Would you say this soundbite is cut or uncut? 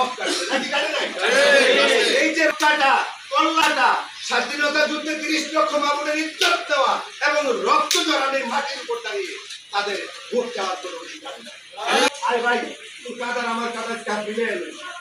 cut